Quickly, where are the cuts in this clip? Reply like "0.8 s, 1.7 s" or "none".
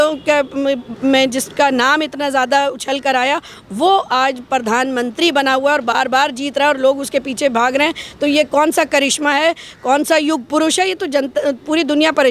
none